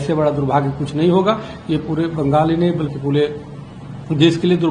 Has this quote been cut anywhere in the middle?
no; 0 cuts

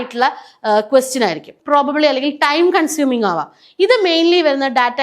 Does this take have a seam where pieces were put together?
yes; 1 cut; at 1.5 s

